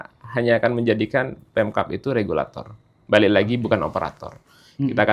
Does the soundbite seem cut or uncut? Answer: uncut